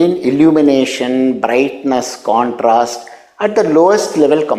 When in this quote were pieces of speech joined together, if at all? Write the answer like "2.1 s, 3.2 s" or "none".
none

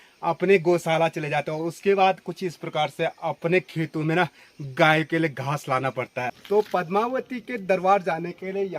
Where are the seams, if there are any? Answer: 6.4 s

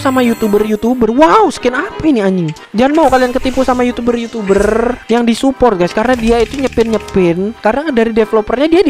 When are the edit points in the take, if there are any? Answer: none

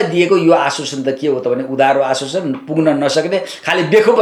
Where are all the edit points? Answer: none

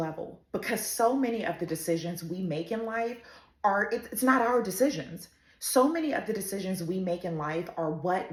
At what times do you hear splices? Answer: none

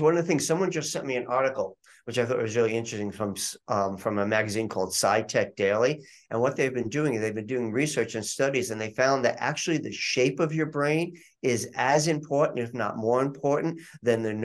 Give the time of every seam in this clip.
none

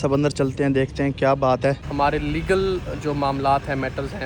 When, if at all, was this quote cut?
1.9 s

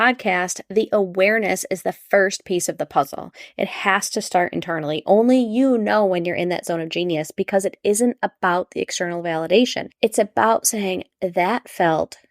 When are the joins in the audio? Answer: 9.8 s

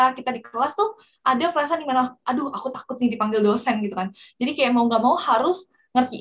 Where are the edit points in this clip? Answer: none

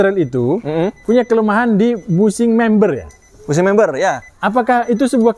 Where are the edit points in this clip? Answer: none

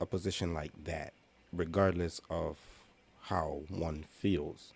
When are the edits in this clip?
none

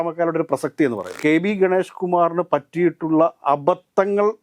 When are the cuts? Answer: 1.2 s

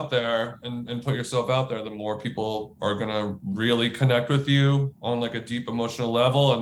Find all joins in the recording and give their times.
none

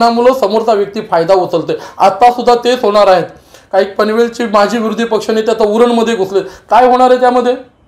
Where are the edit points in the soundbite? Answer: none

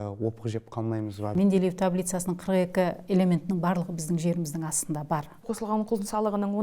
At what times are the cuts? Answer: 1.3 s, 5.4 s

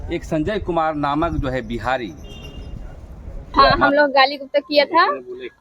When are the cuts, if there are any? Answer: 3.5 s

